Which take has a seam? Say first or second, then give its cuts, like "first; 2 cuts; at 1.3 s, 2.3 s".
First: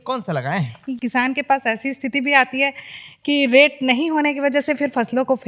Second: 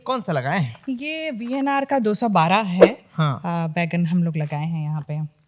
first; 1 cut; at 1.0 s